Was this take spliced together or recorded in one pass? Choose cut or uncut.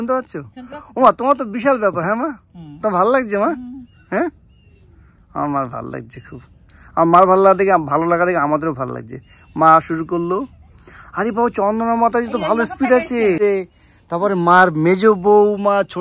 cut